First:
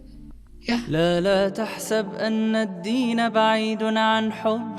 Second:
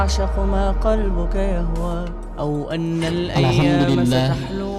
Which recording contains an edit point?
first; 1 cut; at 0.9 s

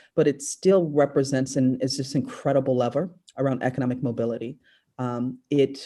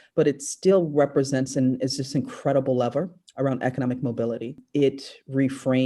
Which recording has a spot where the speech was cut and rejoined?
second; 1 cut; at 4.6 s

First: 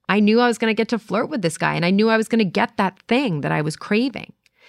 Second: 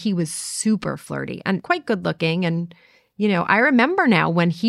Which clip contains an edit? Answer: second; 1 cut; at 1.6 s

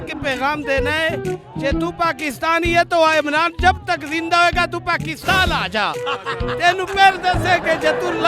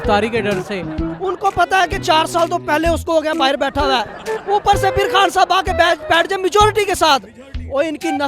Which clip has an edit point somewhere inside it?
second; 1 cut; at 0.9 s

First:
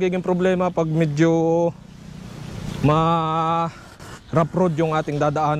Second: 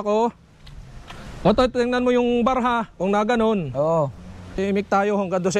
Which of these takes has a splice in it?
second; 1 cut; at 4.6 s

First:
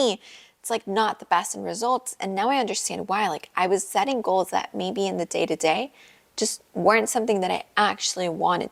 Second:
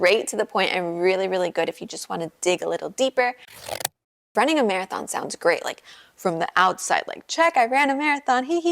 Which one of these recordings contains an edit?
second; 1 cut; at 3.7 s

